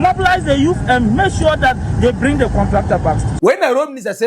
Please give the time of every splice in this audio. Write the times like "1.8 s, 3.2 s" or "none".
3.3 s